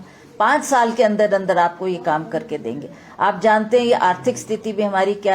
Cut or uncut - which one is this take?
uncut